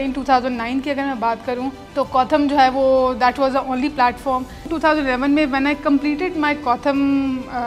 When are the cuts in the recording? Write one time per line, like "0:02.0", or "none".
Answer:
0:01.8
0:04.7